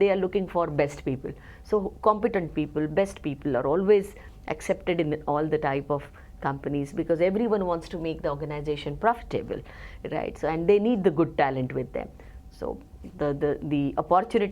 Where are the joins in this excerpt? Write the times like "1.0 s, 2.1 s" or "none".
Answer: none